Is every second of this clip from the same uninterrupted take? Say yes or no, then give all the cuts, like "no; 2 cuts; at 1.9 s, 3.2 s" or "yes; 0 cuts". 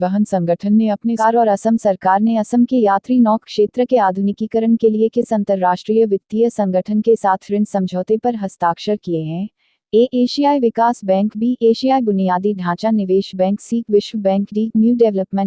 no; 1 cut; at 1.2 s